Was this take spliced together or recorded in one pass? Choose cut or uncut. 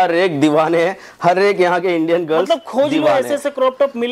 uncut